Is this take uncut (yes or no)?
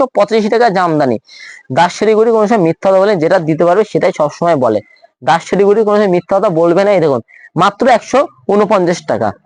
yes